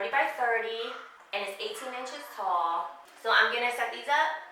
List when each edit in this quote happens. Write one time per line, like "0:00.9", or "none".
0:01.1
0:03.0